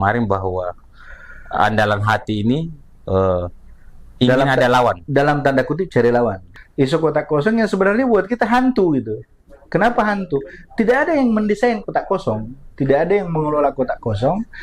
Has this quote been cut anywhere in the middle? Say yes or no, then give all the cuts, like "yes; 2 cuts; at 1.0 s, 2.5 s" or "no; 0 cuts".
yes; 1 cut; at 6.4 s